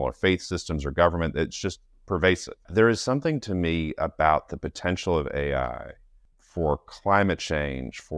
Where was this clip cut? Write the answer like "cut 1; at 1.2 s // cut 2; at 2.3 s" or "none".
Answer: cut 1; at 2.7 s